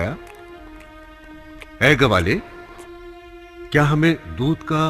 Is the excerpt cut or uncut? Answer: cut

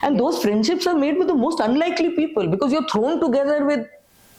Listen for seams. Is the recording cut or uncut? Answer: uncut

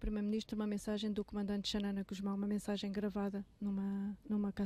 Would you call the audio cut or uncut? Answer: uncut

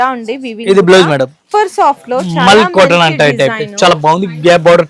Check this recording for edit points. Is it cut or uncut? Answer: cut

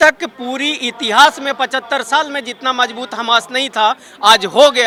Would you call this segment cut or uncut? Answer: uncut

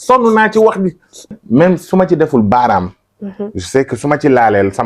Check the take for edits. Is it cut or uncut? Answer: cut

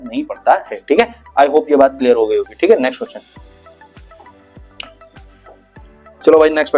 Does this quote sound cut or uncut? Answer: uncut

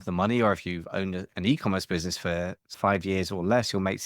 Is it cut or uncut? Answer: cut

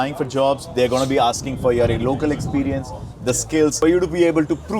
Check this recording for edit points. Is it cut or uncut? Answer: cut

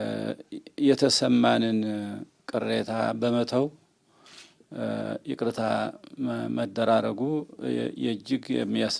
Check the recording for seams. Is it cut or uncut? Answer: uncut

